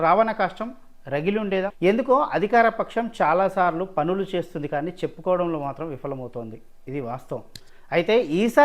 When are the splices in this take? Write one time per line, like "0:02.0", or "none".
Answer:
0:01.7